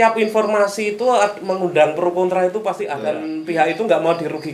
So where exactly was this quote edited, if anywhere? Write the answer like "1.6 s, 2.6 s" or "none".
3.3 s

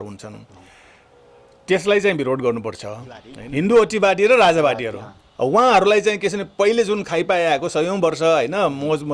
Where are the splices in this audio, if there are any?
3.4 s

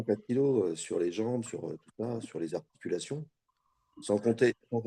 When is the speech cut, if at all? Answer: none

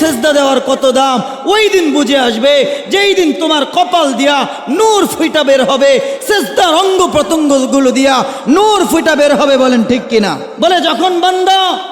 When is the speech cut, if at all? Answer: 10.5 s

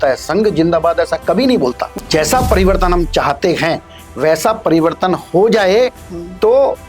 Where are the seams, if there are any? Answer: 1.9 s

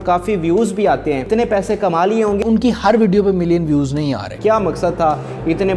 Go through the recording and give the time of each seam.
1.2 s, 2.4 s, 4.3 s

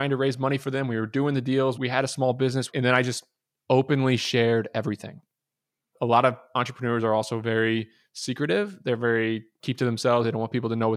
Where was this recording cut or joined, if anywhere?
9.6 s

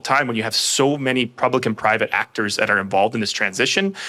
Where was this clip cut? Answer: none

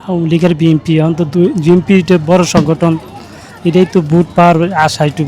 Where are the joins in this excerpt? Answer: none

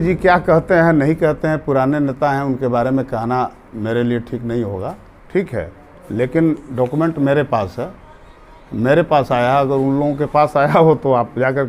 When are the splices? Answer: none

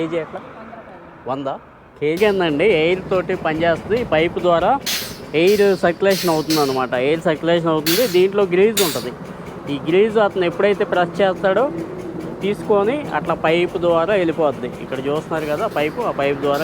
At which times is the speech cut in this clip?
2.2 s

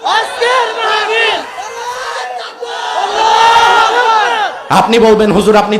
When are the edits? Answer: 4.5 s

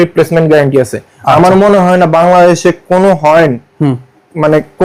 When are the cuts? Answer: none

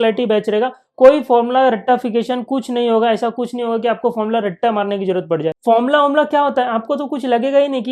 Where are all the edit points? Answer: 5.6 s

